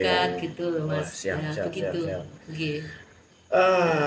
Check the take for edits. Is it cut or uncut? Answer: uncut